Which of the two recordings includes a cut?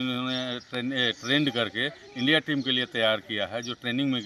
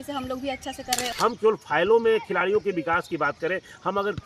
second; 1 cut; at 1.1 s

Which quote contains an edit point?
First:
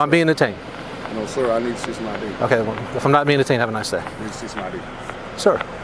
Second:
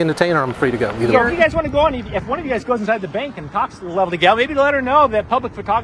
second; 1 cut; at 1.1 s

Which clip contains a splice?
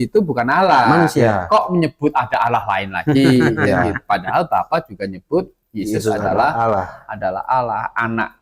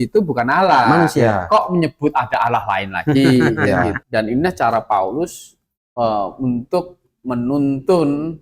second; 1 cut; at 4.0 s

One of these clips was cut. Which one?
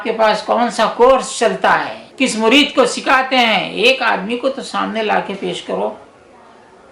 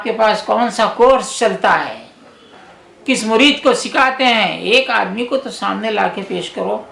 first; 1 cut; at 2.0 s

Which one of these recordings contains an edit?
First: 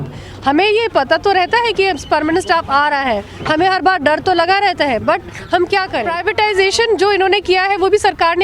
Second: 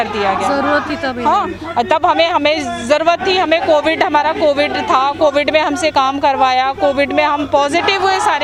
first; 1 cut; at 6.1 s

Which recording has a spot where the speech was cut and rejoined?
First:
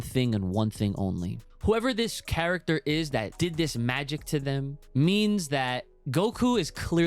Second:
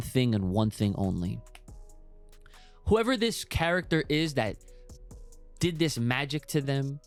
first; 4 cuts; at 1.4 s, 3.3 s, 4.8 s, 5.9 s

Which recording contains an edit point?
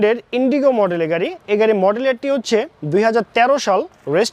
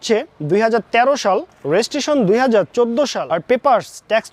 second; 1 cut; at 3.3 s

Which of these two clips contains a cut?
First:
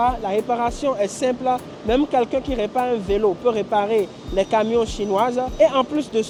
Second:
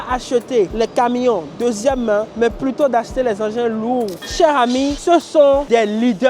second; 1 cut; at 4.2 s

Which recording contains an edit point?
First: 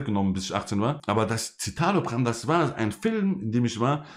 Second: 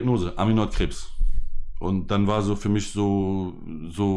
first; 1 cut; at 1.0 s

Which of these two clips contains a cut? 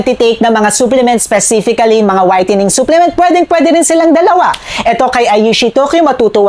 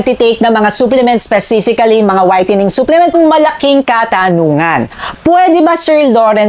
second; 1 cut; at 3.1 s

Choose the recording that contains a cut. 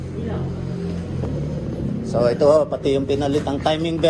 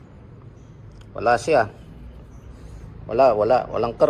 first; 1 cut; at 1.2 s

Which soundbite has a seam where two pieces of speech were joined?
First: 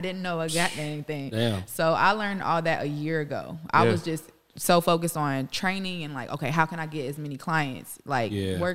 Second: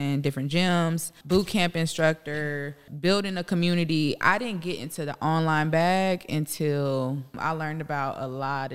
second; 3 cuts; at 1.2 s, 2.9 s, 7.3 s

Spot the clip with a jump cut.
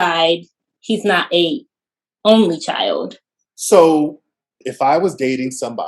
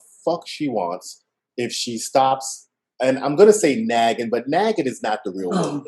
first; 1 cut; at 4.5 s

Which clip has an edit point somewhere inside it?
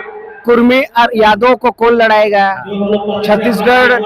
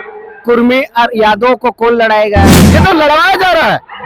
second; 1 cut; at 2.6 s

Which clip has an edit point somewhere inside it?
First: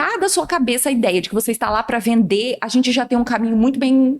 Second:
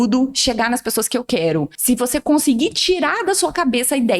second; 1 cut; at 1.7 s

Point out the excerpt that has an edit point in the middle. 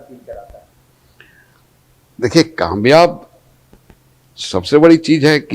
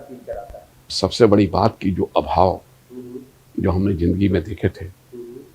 second; 1 cut; at 0.9 s

